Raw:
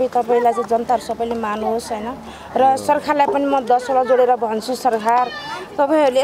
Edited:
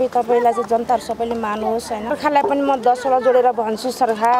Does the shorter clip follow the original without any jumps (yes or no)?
no